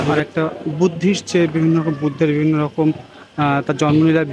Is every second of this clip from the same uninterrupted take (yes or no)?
yes